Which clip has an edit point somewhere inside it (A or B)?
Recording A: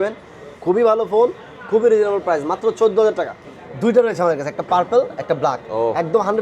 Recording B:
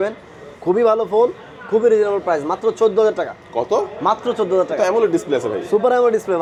A